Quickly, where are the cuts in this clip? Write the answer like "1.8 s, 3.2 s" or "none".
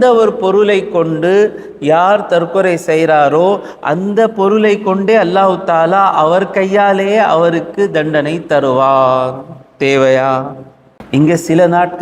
none